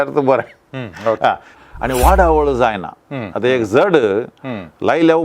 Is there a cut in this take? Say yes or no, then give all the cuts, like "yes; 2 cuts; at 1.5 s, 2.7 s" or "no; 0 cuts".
yes; 1 cut; at 1.5 s